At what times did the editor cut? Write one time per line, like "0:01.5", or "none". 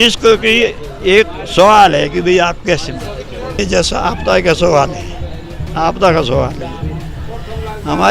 0:03.6